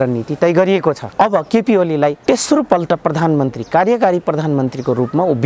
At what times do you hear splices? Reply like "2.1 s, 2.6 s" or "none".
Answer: 1.0 s, 2.2 s

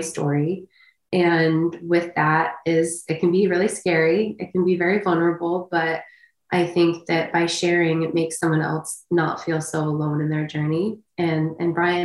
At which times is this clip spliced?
none

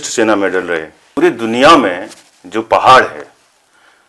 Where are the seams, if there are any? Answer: 1.0 s

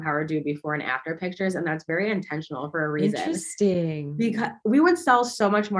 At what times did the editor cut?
none

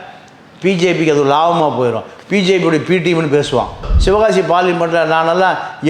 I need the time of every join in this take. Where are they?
3.8 s

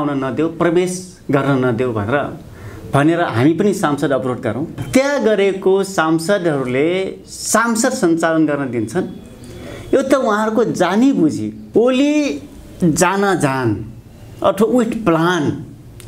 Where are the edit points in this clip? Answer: 4.8 s, 11.6 s

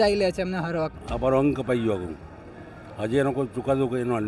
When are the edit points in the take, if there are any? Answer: 1.0 s

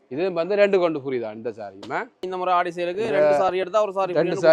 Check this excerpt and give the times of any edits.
2.3 s

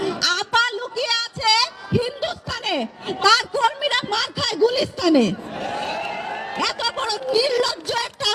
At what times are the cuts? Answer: none

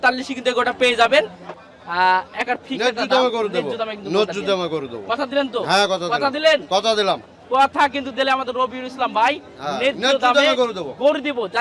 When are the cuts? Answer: 1.4 s

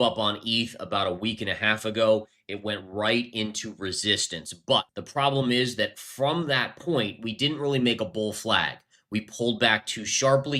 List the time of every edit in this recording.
none

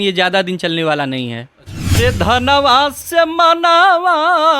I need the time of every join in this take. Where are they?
2.0 s

